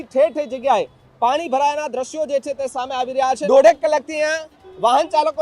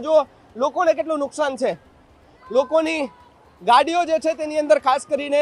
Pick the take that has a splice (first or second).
first